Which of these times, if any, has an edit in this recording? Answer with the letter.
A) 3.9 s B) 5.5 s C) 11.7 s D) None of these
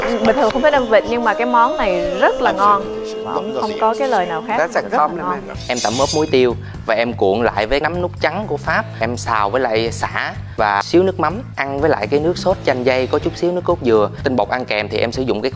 B